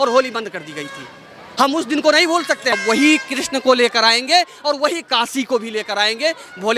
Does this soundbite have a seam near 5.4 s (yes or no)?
no